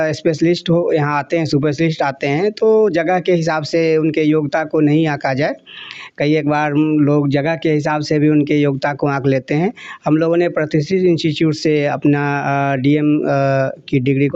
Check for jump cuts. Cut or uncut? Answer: uncut